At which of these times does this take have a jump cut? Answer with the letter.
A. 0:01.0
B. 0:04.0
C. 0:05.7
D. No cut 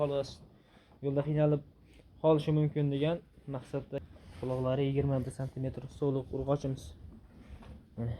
B